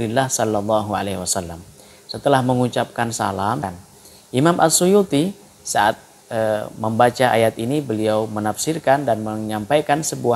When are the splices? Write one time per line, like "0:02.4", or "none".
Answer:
0:03.6